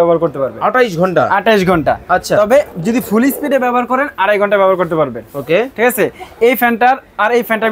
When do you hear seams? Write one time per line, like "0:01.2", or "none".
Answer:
none

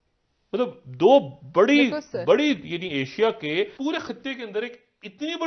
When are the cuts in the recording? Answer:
0:03.7

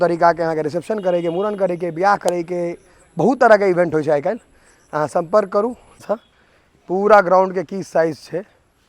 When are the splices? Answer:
0:06.0

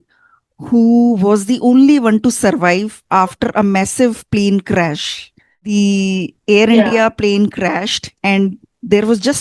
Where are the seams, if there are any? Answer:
0:05.7

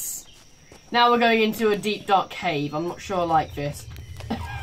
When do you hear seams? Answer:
none

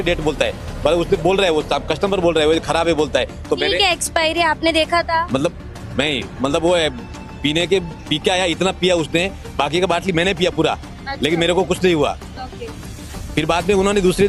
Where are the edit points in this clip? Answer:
none

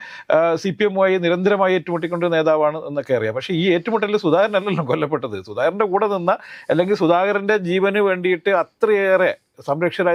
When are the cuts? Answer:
none

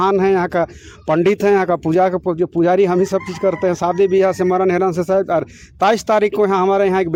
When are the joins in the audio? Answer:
none

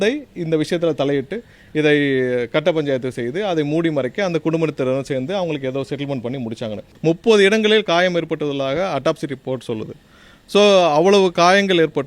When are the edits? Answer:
0:06.8

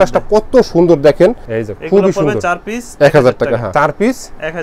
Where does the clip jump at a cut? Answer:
0:01.5
0:03.7

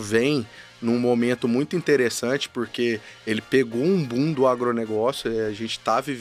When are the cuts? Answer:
none

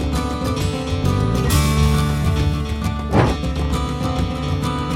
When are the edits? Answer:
none

